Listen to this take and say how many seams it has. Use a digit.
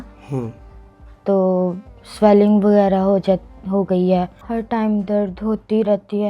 1